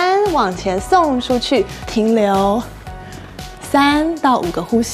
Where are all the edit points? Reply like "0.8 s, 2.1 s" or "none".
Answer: none